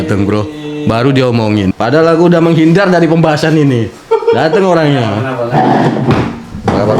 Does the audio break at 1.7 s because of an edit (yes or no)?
yes